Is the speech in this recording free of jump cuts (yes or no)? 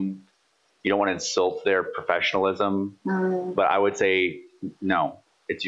yes